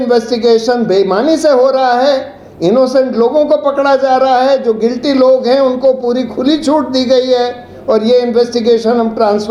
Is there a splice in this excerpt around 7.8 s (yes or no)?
no